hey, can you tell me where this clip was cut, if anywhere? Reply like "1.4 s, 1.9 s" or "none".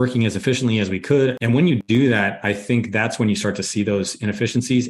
1.6 s